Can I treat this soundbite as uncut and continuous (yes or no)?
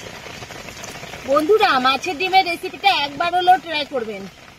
yes